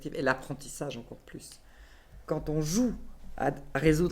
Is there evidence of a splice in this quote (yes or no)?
yes